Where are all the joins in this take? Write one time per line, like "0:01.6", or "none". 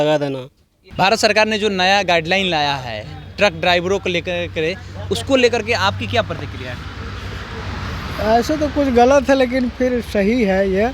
none